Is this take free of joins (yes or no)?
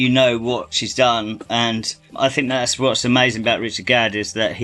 yes